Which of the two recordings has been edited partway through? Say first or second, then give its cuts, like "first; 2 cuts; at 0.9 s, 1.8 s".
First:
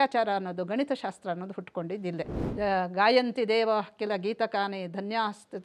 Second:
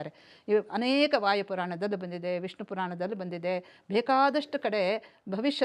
first; 1 cut; at 2.4 s